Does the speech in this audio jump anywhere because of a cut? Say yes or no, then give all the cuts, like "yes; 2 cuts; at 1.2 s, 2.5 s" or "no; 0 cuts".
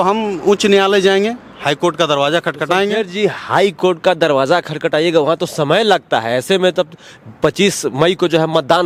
no; 0 cuts